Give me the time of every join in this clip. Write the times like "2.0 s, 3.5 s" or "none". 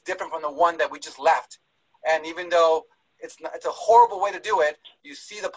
none